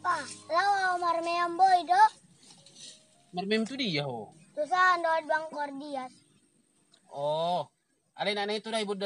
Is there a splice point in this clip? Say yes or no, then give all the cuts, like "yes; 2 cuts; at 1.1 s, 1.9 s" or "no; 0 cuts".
no; 0 cuts